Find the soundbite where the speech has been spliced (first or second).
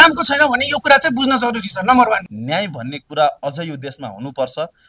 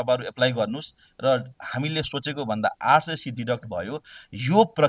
first